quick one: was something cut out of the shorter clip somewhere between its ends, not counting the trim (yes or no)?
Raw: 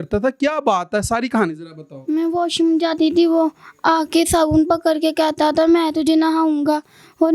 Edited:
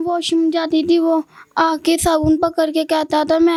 no